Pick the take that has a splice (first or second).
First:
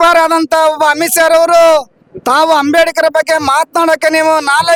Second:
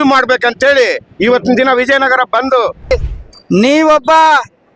second